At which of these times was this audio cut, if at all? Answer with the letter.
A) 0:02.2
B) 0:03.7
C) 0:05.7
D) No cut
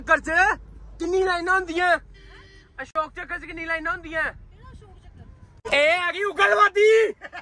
C